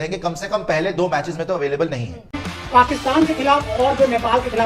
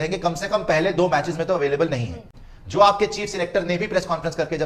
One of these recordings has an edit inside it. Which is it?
first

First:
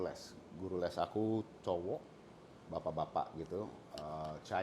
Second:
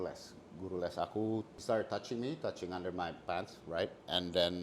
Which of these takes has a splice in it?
second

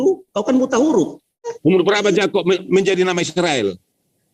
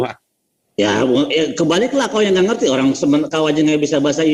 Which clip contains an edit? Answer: first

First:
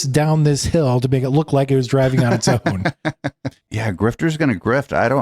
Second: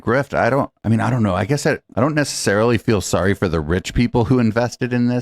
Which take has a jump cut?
first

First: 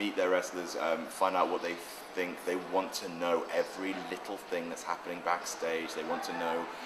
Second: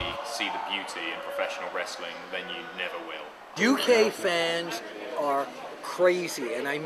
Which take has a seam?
second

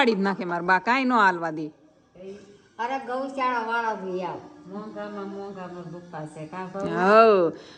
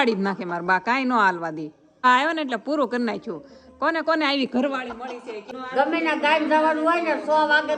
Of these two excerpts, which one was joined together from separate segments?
second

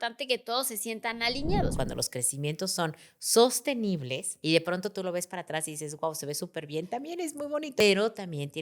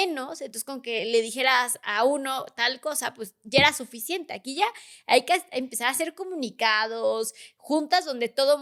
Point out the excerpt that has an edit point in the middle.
first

